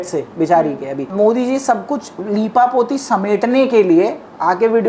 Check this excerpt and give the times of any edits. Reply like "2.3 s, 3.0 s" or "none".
1.0 s